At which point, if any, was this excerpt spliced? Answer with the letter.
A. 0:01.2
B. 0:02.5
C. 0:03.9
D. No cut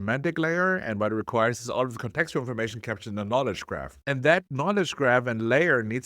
C